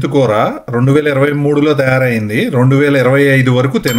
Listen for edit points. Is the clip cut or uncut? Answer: uncut